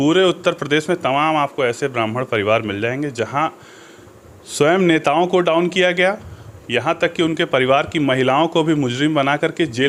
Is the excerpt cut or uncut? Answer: uncut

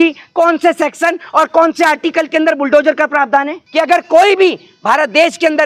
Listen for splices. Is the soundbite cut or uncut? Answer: cut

